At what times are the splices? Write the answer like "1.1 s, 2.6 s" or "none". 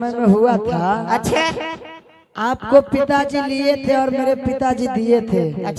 none